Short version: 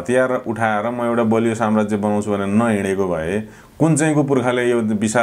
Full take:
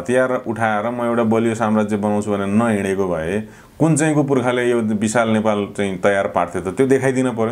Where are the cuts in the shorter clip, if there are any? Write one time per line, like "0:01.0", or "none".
none